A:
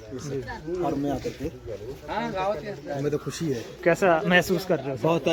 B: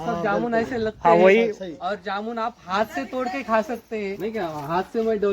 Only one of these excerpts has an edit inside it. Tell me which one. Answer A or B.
B